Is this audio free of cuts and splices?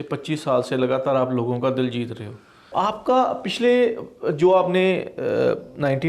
no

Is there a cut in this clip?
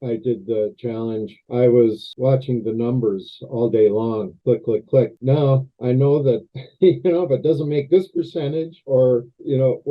yes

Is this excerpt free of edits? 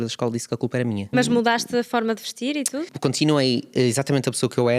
no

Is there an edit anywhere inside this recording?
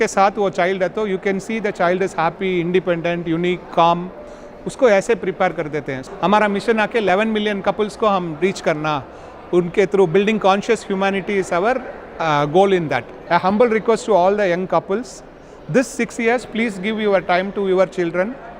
yes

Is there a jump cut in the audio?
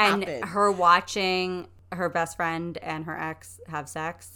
yes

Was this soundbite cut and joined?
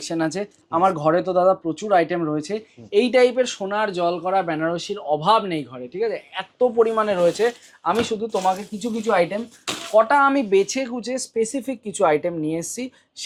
no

